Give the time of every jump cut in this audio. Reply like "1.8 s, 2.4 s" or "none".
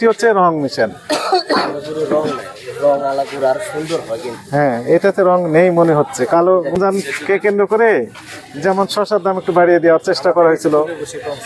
6.7 s